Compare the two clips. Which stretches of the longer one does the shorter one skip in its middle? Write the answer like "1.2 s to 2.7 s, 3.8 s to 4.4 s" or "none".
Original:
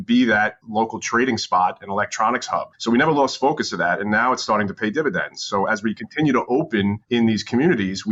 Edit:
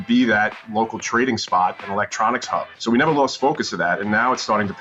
none